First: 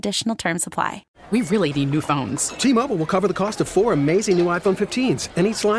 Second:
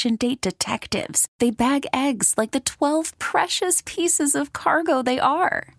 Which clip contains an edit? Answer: first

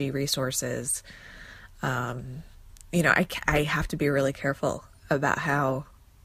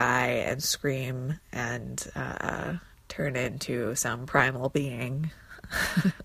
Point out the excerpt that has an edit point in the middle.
second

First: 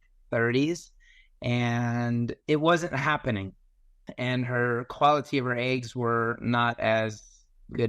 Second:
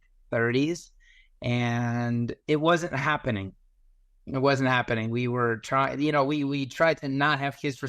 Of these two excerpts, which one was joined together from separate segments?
first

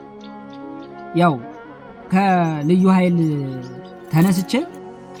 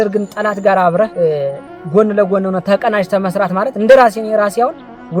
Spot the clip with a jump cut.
second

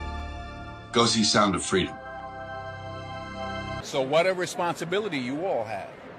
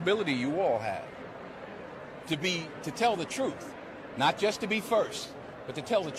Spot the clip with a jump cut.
first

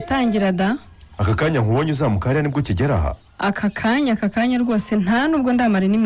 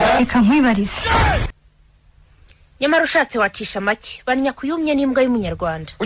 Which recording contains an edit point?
second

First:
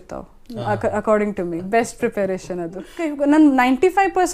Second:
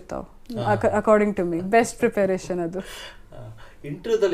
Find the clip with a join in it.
first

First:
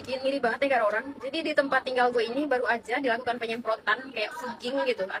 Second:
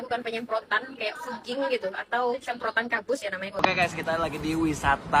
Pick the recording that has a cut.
second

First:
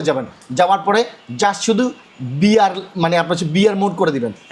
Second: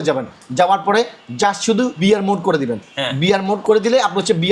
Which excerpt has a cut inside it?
second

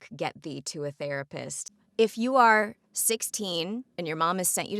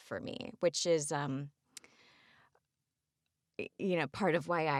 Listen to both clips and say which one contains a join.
first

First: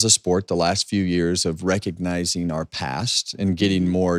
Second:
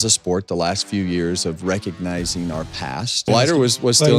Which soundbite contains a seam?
second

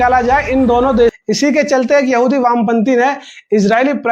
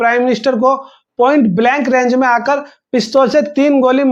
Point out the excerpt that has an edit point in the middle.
first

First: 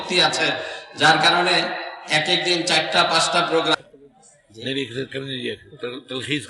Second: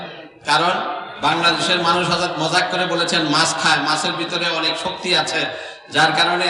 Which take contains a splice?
first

